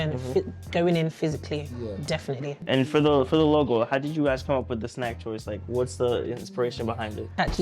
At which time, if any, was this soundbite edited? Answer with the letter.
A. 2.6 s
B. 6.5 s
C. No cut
A